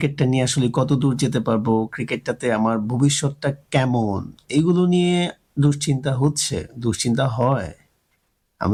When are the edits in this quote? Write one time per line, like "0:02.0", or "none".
none